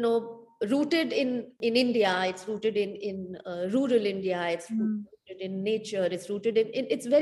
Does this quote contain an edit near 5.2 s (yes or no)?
no